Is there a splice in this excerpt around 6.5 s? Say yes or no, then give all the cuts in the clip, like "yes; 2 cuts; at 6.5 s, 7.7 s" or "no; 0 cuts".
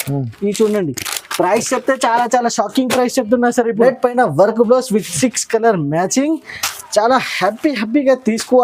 no; 1 cut; at 3.8 s